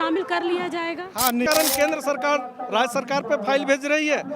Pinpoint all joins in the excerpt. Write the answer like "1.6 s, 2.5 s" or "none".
1.5 s